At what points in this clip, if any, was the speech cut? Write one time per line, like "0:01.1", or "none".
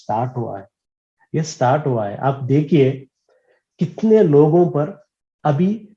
none